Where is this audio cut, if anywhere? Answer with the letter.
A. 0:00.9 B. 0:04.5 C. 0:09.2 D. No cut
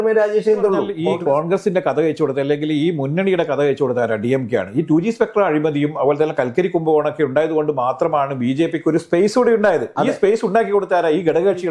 A